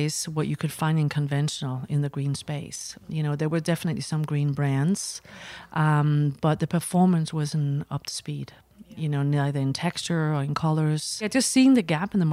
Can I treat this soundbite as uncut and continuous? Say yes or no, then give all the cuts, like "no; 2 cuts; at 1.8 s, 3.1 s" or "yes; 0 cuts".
no; 1 cut; at 11.3 s